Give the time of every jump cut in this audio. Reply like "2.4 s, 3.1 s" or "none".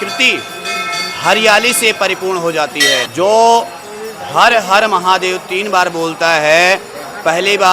3.1 s